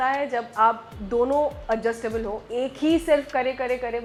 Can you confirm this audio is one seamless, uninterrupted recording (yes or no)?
yes